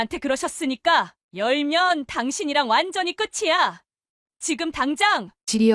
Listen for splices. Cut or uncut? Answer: cut